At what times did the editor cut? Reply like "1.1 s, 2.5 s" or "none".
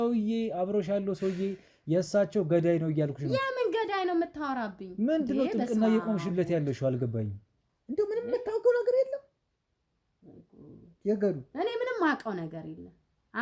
none